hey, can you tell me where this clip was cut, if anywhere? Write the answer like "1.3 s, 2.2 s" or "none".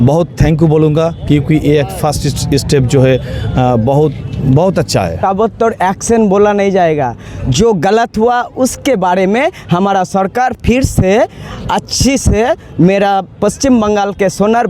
5.2 s